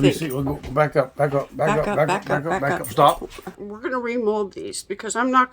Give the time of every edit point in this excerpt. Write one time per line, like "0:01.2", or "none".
0:03.6